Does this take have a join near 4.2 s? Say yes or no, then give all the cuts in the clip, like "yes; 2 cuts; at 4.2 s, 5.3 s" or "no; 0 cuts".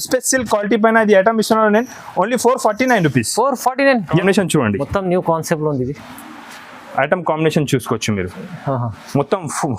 yes; 1 cut; at 4.2 s